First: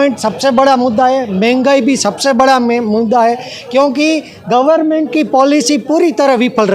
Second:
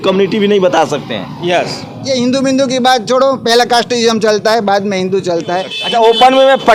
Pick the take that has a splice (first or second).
second